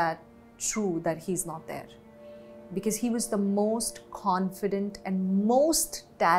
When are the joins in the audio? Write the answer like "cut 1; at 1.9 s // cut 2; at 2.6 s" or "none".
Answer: none